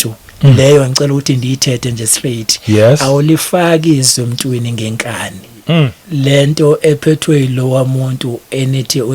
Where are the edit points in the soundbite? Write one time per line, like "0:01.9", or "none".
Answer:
0:06.0

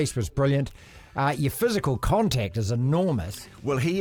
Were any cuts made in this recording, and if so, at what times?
none

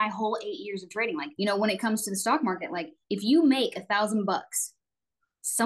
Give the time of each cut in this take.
0:01.3

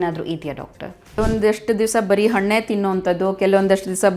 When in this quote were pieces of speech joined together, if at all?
0:01.2

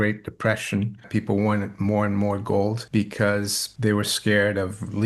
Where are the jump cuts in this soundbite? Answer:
0:01.1
0:02.8
0:03.6

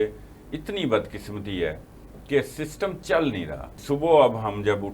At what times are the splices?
0:03.7

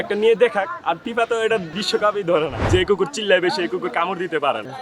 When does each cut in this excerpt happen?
0:01.0
0:01.7
0:02.6

